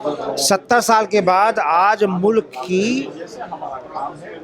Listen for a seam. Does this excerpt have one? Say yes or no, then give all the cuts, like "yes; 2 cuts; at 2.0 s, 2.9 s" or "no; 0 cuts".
no; 0 cuts